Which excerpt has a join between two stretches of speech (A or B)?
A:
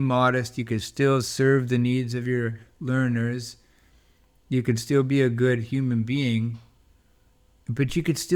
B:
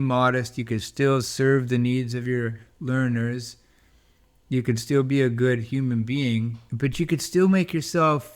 B